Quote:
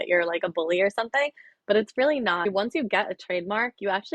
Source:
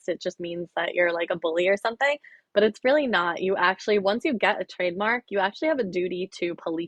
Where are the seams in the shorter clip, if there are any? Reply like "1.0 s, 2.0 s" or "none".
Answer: 2.5 s